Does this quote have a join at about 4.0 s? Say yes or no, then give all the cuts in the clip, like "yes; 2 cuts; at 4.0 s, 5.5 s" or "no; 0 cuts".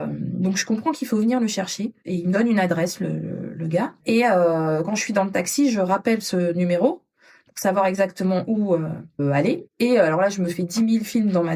yes; 2 cuts; at 4.0 s, 9.2 s